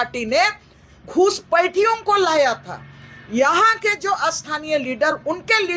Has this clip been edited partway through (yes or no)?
no